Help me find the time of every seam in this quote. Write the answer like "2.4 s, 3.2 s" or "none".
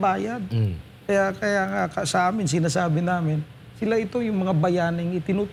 none

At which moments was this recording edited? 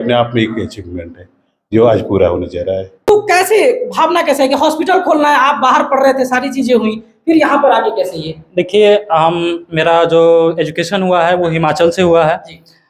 2.9 s

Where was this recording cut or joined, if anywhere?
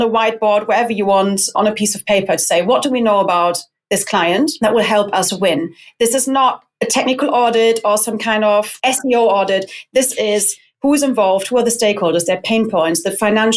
1.5 s, 4.5 s, 8.7 s

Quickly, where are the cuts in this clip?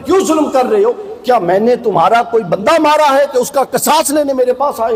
none

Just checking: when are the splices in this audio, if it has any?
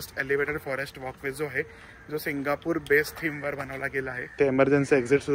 4.3 s

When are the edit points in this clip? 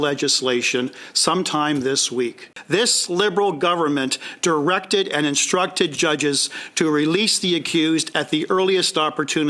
2.5 s

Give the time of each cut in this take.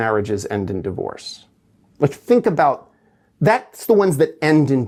none

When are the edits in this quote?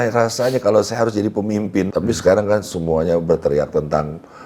1.9 s

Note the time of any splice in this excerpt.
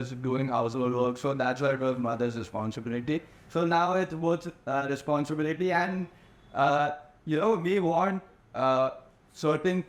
none

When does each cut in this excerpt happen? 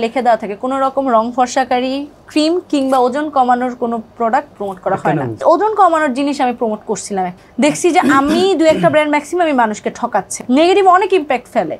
5.4 s, 7.4 s, 10.3 s

